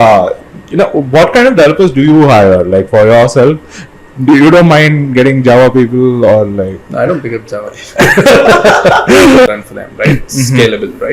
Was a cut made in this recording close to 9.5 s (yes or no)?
yes